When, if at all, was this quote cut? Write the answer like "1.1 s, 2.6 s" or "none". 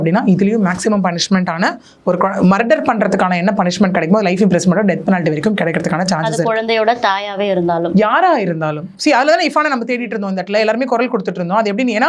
none